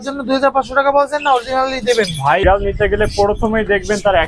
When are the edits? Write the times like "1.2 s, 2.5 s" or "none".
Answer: 2.4 s